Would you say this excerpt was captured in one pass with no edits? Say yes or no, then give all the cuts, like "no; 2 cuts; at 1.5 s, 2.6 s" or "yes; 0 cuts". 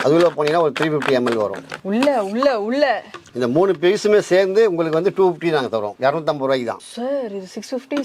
yes; 0 cuts